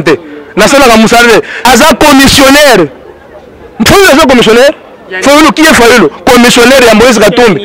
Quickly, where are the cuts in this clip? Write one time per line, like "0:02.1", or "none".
0:01.6